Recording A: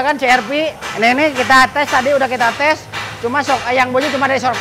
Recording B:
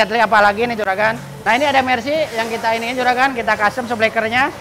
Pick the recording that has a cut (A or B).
B